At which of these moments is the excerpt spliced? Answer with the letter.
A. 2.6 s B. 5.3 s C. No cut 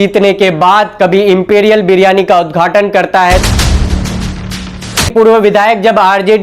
B